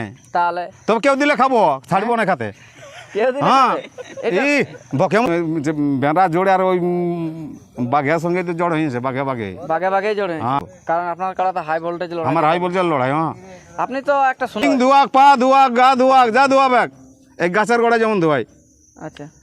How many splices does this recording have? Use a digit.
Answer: 3